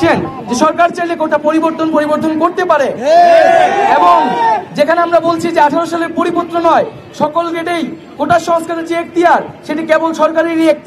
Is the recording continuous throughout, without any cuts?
yes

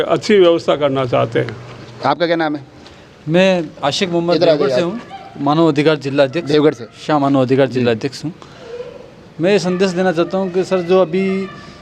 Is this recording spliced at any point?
no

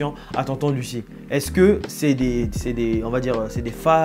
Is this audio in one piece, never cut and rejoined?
yes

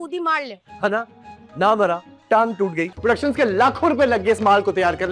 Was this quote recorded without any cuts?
no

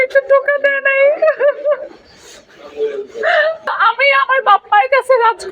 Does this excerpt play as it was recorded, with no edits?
no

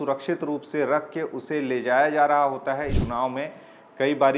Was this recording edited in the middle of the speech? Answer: yes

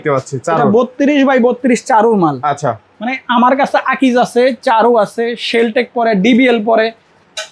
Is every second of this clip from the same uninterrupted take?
yes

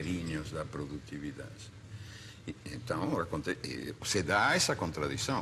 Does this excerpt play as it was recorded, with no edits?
yes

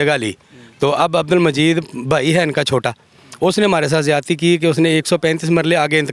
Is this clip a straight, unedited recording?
yes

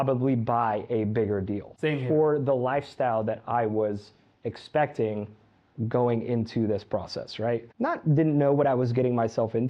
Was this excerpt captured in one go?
no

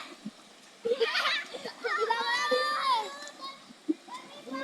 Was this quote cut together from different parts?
no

